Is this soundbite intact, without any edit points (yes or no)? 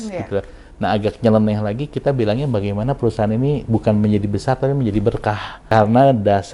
no